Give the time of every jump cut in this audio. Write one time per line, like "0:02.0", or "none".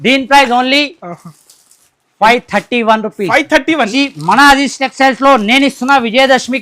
0:03.9